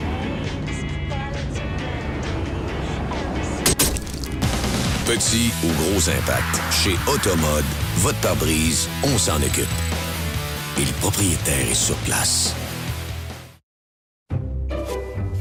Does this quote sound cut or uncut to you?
uncut